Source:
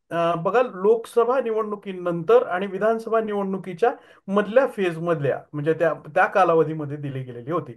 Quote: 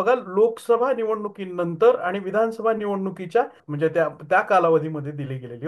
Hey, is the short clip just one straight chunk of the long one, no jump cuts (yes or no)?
no